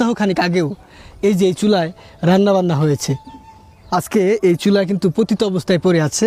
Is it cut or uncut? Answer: uncut